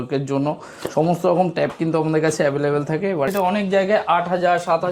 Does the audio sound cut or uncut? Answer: cut